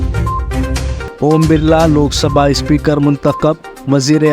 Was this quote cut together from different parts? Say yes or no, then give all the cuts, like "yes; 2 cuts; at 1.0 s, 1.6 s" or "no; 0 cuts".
yes; 1 cut; at 1.0 s